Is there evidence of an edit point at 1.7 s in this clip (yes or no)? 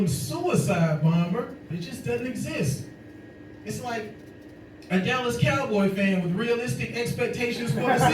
yes